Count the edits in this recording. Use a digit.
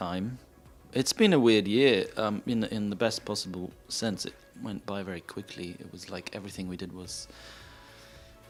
0